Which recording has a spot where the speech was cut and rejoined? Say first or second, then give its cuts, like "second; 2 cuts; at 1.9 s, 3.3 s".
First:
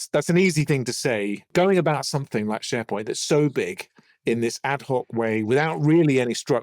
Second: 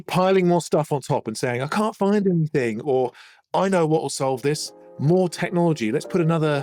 first; 1 cut; at 1.5 s